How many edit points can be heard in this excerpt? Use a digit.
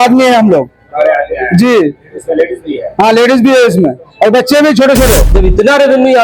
1